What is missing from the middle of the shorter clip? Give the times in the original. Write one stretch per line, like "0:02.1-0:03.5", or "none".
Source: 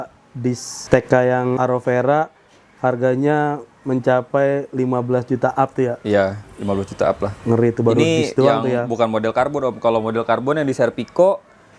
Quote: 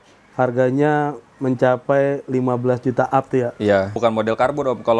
0:06.4-0:08.9